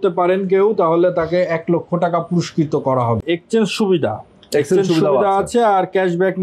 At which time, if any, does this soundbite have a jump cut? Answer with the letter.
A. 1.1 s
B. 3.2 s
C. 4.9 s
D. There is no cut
B